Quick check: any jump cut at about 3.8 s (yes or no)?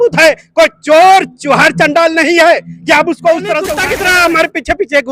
yes